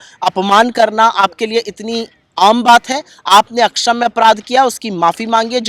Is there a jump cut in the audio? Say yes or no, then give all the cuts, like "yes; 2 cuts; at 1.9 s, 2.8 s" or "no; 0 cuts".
no; 0 cuts